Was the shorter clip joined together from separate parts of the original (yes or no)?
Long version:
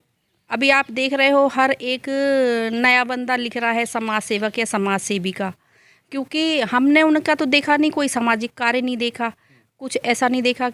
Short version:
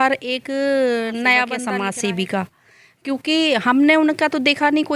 yes